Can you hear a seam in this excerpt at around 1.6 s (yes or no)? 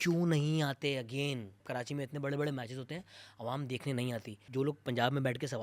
yes